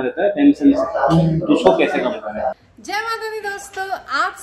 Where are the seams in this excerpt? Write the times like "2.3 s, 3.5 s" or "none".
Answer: 2.6 s